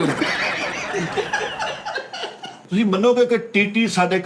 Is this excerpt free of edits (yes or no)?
no